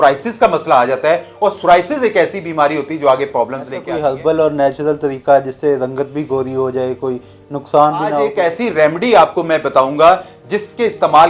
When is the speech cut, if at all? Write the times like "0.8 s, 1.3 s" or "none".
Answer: 3.8 s, 8.3 s